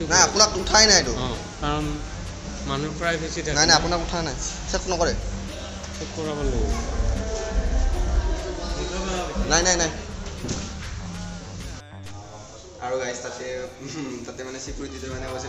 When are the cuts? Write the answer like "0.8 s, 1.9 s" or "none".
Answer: none